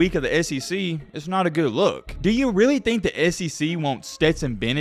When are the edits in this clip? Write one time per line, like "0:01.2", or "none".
0:02.1